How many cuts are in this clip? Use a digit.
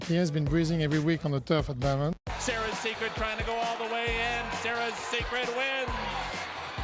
1